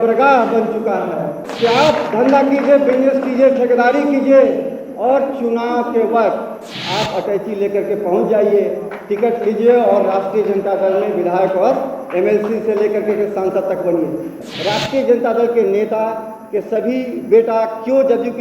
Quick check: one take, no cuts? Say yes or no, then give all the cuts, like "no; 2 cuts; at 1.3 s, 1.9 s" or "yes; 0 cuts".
no; 2 cuts; at 1.4 s, 14.4 s